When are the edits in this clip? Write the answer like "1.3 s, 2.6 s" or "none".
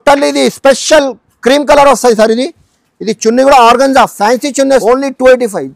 4.8 s